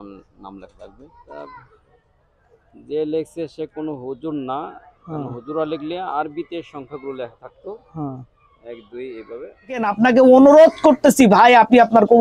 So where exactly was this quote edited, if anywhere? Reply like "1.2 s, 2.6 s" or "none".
1.2 s, 9.9 s